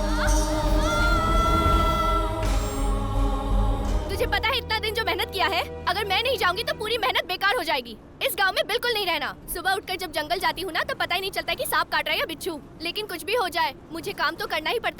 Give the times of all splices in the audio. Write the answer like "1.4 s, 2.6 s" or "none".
4.0 s, 9.4 s

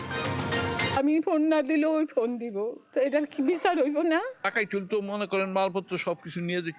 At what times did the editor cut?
0.9 s, 2.8 s, 4.3 s

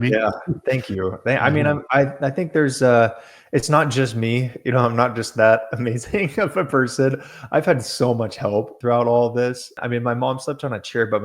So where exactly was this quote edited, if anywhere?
8.7 s, 9.8 s

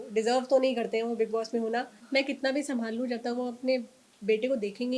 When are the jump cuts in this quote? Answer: 2.0 s

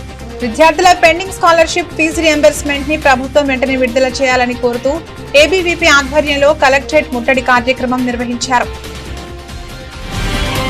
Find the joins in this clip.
8.6 s

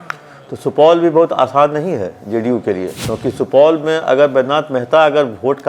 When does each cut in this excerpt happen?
3.0 s

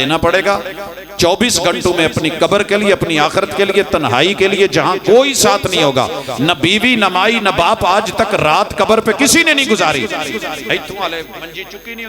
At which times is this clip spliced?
none

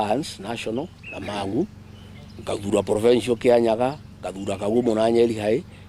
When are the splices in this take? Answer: none

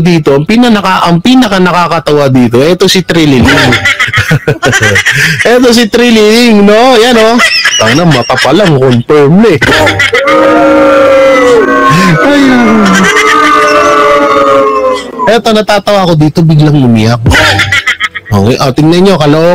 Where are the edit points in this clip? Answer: none

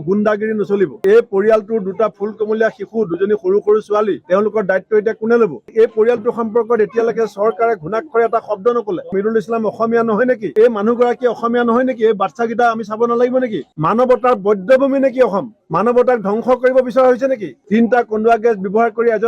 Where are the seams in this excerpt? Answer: 1.0 s, 5.7 s, 10.5 s, 17.6 s

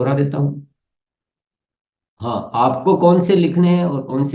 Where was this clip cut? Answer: none

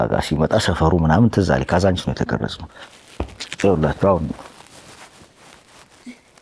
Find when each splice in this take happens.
none

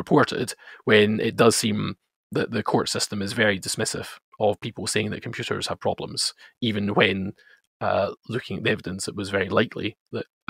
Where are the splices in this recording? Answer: none

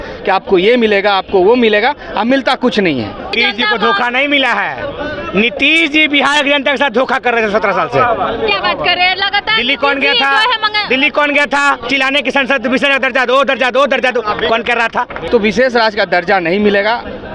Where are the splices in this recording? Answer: 3.3 s, 15.2 s

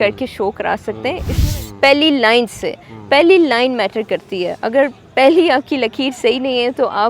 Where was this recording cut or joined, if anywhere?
1.4 s

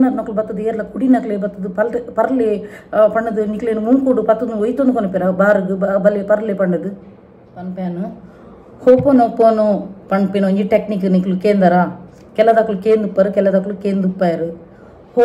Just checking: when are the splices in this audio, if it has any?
7.6 s

